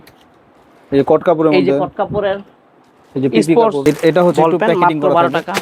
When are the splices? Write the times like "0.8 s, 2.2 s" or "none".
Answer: 3.8 s